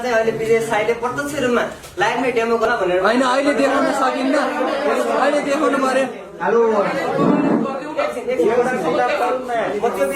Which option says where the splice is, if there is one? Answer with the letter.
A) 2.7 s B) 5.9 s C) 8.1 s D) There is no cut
A